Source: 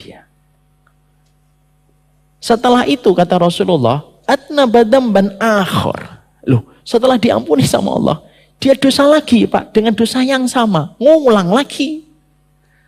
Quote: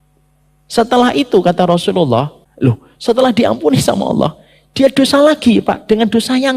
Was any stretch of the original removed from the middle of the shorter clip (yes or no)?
yes